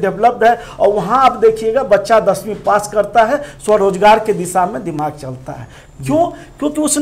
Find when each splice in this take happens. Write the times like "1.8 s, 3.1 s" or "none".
none

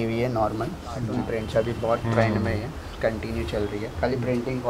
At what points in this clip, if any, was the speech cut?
1.1 s

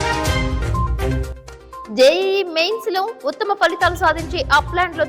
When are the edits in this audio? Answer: 0.9 s

